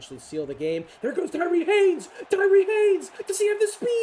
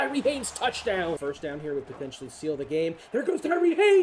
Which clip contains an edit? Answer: second; 1 cut; at 1.2 s

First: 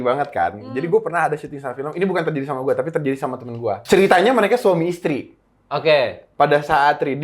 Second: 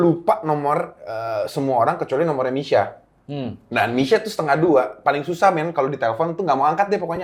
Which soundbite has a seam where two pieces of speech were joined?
first; 1 cut; at 3.8 s

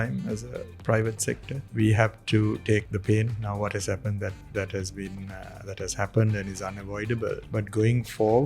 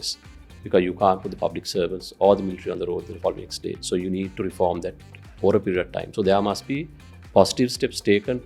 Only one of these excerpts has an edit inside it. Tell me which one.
first; 3 cuts; at 1.6 s, 2.9 s, 7.5 s

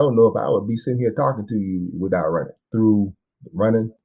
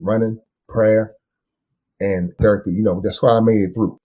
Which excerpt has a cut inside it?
first; 1 cut; at 2.6 s

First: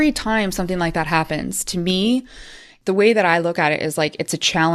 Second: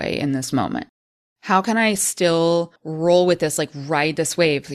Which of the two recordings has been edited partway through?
second; 2 cuts; at 1.0 s, 2.8 s

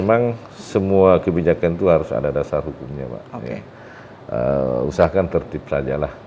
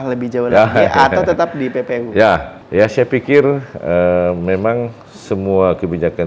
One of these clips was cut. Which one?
second; 1 cut; at 2.6 s

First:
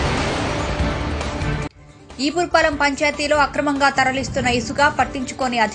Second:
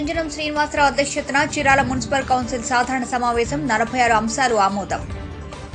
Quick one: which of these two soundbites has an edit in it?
first; 1 cut; at 1.7 s

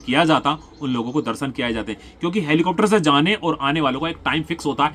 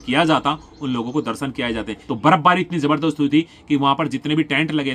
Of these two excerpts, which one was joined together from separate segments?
second; 1 cut; at 2.0 s

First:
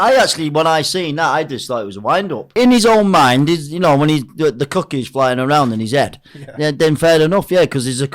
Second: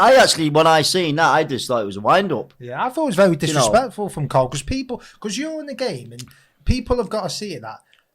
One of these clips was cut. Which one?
first; 1 cut; at 2.5 s

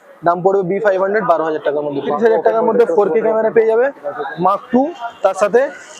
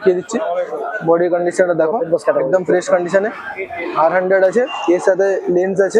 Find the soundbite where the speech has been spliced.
first; 1 cut; at 2.1 s

